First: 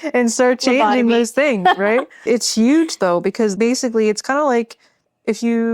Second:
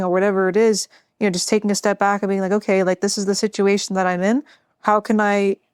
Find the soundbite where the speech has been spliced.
first; 2 cuts; at 2.3 s, 3.5 s

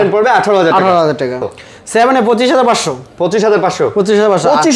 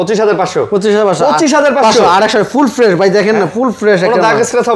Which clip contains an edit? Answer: first; 1 cut; at 1.4 s

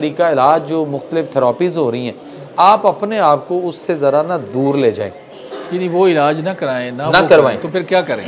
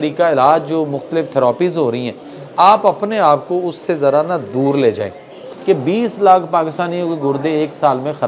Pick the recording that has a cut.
second; 1 cut; at 5.5 s

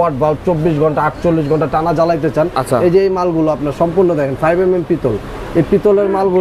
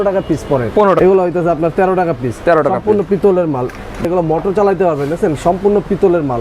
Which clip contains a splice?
second; 2 cuts; at 1.0 s, 4.0 s

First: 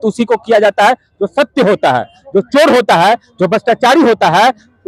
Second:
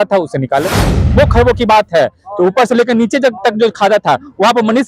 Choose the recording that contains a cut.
second; 1 cut; at 1.1 s

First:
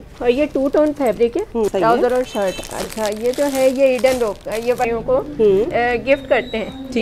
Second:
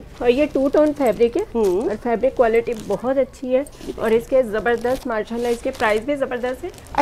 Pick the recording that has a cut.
first; 2 cuts; at 1.7 s, 4.9 s

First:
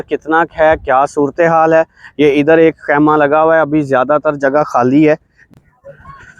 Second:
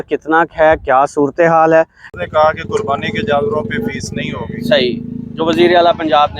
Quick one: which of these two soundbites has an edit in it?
second; 1 cut; at 2.1 s

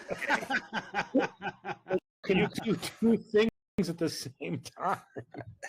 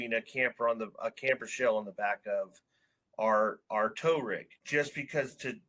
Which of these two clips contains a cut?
second; 1 cut; at 4.6 s

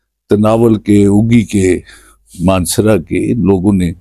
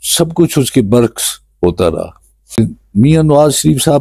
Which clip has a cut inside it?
second; 1 cut; at 2.6 s

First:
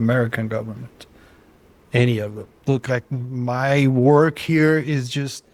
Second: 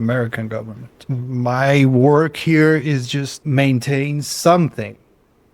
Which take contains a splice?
second; 2 cuts; at 1.1 s, 3.4 s

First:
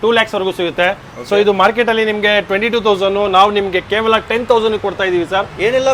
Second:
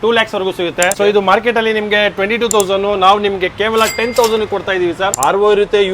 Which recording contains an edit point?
second; 2 cuts; at 0.9 s, 5.1 s

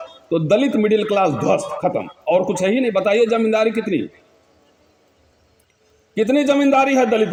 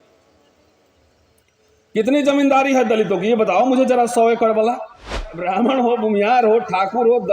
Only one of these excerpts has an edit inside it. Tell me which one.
second; 1 cut; at 5.4 s

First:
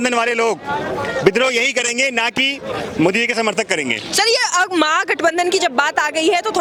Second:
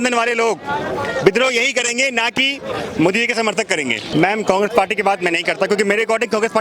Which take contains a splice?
second; 1 cut; at 4.0 s

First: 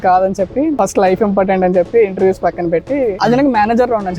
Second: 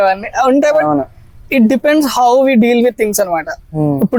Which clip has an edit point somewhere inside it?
first; 1 cut; at 3.2 s

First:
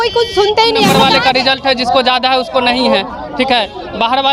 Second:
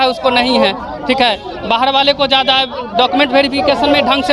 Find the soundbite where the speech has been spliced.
first; 1 cut; at 0.9 s

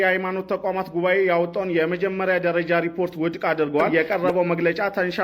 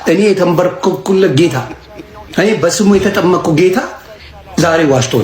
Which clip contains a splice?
first; 1 cut; at 3.9 s

